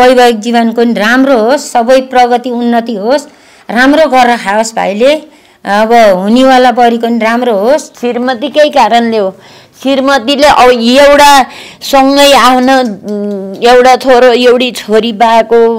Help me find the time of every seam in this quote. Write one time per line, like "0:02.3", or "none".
0:07.9